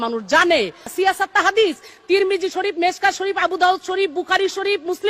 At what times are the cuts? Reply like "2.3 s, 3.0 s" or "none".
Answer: 0.9 s

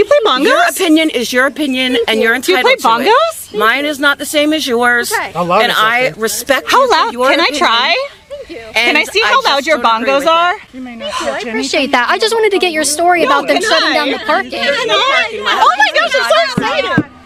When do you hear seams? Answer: none

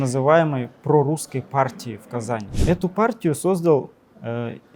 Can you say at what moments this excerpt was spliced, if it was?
2.5 s

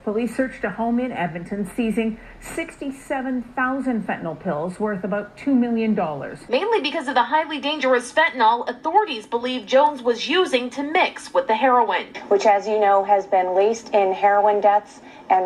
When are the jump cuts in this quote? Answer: 6.3 s

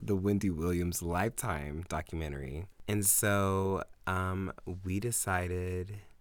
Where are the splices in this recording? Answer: 2.6 s

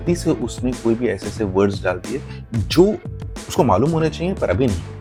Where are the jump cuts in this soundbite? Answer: none

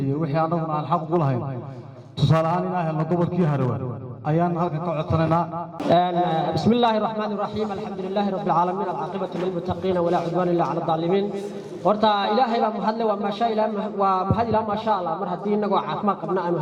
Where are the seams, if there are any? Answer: none

